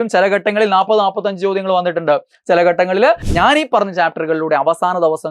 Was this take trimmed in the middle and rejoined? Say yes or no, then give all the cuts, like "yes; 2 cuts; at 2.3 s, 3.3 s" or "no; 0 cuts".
yes; 1 cut; at 3.3 s